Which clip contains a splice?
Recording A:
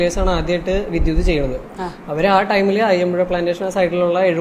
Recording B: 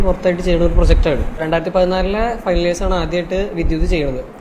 B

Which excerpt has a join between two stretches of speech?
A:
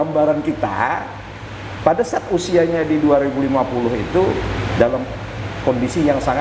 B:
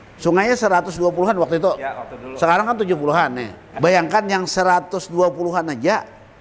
B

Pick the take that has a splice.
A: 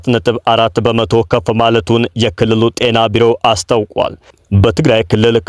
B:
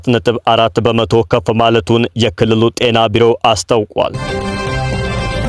B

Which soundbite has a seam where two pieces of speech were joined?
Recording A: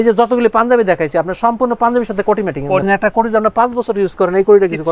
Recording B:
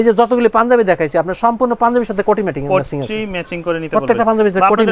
A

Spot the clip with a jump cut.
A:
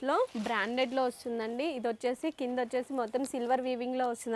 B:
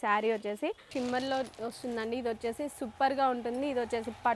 B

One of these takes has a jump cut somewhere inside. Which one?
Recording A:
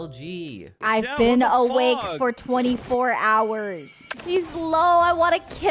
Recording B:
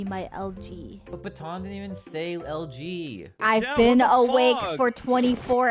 A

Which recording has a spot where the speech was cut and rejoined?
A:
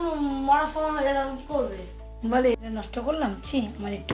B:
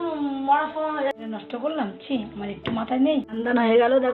B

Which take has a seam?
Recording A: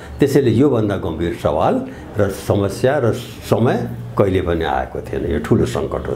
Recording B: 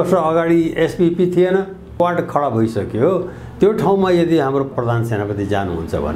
B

